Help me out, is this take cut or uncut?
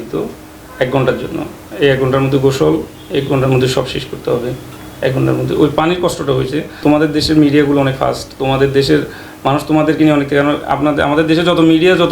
uncut